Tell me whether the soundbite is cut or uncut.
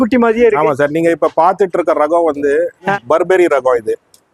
uncut